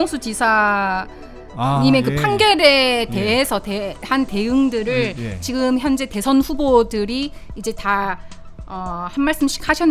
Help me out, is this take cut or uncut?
uncut